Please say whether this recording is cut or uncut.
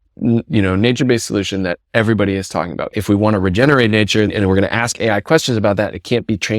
cut